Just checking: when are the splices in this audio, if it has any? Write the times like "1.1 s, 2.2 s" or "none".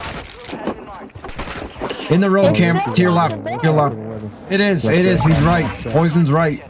none